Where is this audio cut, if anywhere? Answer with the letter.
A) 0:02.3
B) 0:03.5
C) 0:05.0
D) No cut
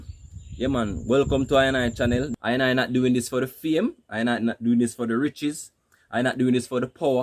A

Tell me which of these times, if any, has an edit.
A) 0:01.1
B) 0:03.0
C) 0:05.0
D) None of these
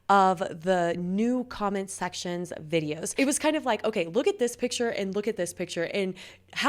B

